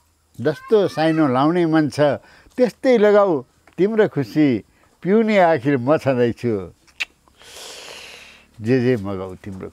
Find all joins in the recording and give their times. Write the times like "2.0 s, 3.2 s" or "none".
none

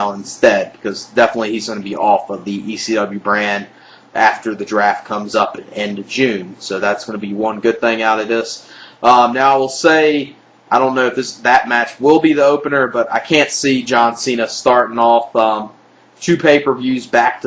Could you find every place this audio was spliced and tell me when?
7.5 s

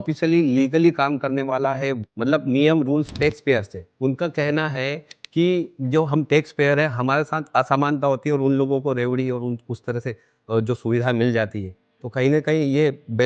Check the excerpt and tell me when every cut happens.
2.1 s, 3.9 s

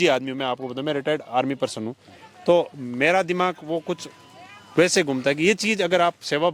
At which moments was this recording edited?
none

